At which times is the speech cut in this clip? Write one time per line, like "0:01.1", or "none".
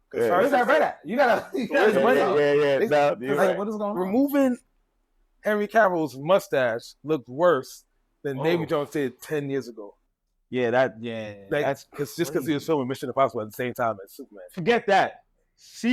none